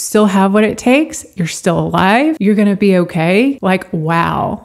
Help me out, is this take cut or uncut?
cut